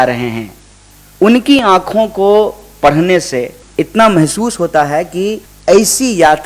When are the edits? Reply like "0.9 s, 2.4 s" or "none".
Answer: 3.6 s, 5.5 s